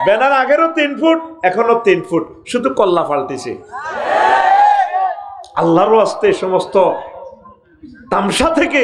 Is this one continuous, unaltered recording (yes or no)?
yes